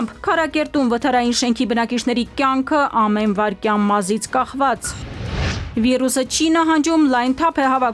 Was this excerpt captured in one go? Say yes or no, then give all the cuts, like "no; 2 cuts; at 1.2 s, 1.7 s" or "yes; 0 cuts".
no; 1 cut; at 5.6 s